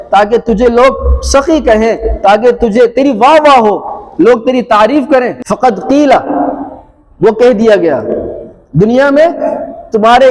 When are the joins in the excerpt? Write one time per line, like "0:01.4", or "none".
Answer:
0:05.4